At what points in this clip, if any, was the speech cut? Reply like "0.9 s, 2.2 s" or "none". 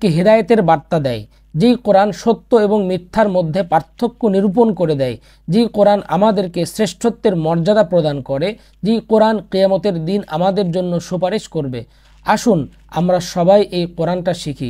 none